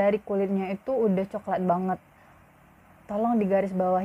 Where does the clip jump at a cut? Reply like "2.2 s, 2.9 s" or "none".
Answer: none